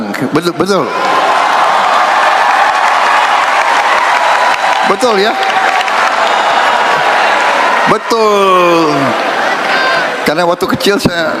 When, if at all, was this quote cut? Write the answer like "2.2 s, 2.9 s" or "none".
none